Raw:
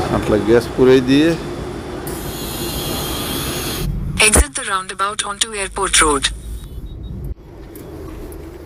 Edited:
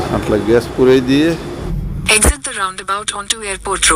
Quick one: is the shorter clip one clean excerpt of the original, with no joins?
no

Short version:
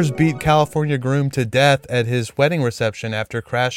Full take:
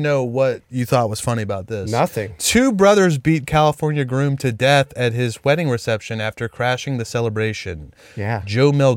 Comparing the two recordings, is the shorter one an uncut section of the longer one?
yes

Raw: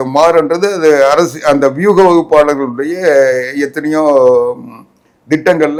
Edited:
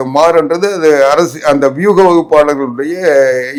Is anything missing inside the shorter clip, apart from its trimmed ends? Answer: no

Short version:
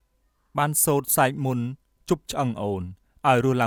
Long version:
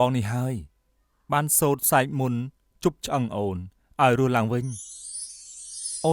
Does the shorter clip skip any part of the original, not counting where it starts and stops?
no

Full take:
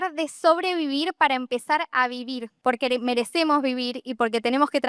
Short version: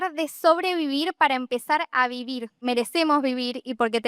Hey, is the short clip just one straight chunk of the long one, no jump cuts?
no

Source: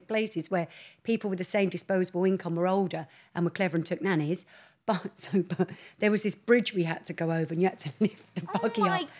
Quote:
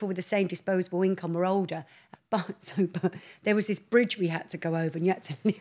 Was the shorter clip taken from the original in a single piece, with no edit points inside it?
no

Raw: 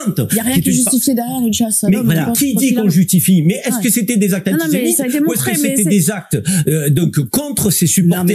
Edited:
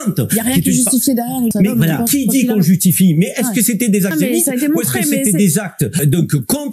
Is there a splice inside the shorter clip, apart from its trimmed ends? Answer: yes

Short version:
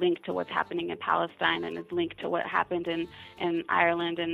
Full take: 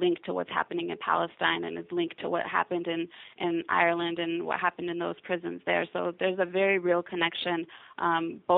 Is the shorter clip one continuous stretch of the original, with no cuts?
yes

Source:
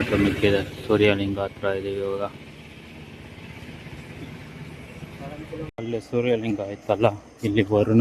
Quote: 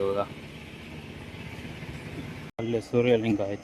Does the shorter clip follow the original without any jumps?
no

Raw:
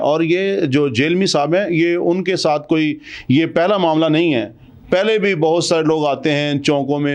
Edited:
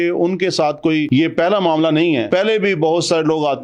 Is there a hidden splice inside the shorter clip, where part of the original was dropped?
yes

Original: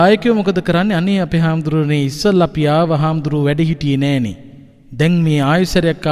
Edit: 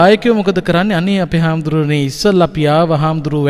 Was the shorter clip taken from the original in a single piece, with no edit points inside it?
yes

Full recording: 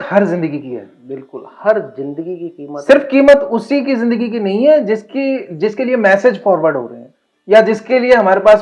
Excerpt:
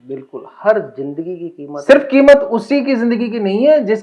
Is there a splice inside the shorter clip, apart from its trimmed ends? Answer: no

